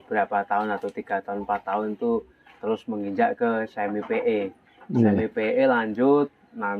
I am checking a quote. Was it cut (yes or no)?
no